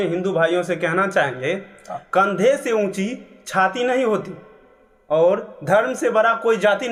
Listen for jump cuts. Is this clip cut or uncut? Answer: uncut